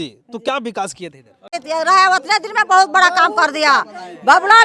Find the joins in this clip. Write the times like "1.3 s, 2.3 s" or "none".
1.6 s

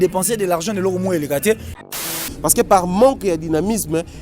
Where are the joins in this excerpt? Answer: 1.8 s

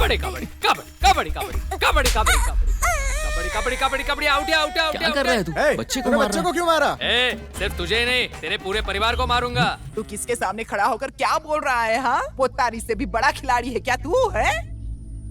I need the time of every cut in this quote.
7.0 s, 9.8 s

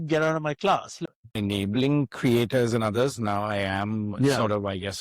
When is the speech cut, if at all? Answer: 1.0 s

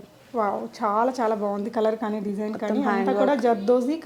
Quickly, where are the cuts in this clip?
none

